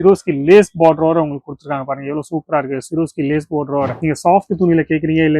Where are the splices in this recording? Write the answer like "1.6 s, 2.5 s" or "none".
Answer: 4.0 s